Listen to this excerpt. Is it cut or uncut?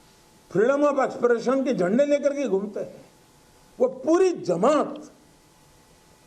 cut